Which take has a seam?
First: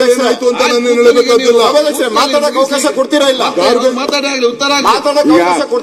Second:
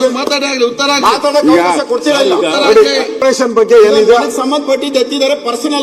second; 1 cut; at 3.1 s

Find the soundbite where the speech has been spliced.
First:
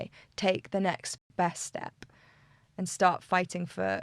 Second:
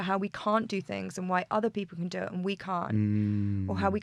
first; 1 cut; at 1.1 s

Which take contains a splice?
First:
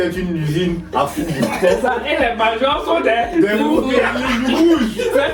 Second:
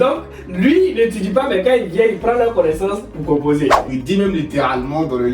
second; 1 cut; at 3.9 s

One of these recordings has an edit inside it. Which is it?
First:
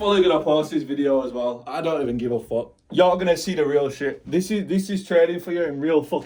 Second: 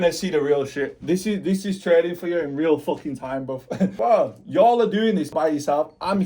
second; 2 cuts; at 3.9 s, 5.3 s

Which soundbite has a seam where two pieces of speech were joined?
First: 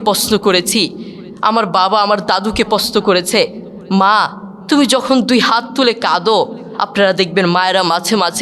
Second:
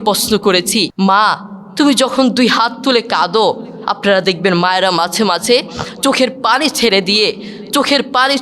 second; 1 cut; at 0.9 s

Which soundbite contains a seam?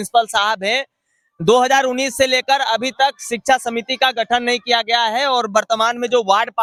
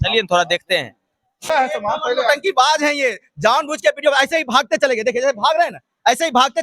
second; 1 cut; at 1.5 s

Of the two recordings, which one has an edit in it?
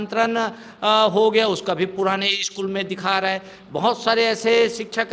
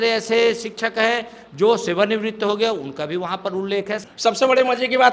second; 1 cut; at 4.0 s

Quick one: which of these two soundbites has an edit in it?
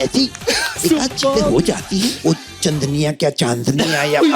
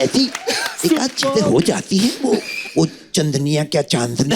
first; 1 cut; at 2.2 s

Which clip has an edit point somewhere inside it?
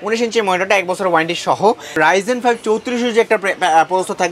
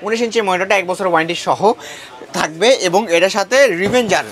first; 1 cut; at 1.9 s

